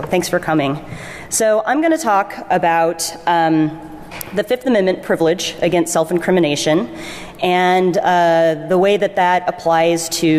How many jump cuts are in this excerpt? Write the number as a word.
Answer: one